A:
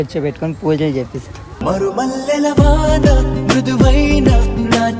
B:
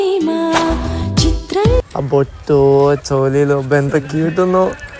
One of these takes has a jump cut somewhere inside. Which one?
B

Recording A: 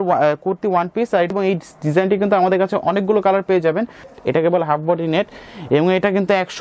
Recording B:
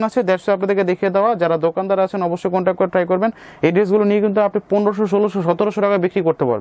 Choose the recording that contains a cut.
A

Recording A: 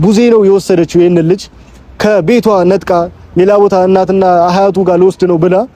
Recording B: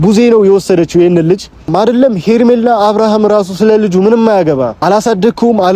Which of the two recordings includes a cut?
B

